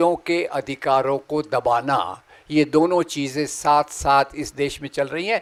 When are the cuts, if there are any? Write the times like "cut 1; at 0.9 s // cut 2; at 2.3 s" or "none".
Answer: none